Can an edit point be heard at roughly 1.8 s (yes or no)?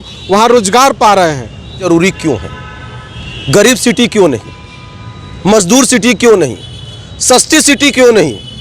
yes